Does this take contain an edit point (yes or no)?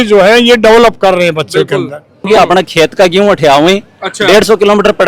yes